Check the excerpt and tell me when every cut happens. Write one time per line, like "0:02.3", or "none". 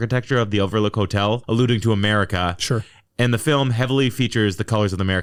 none